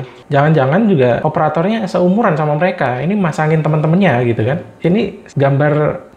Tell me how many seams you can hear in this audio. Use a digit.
1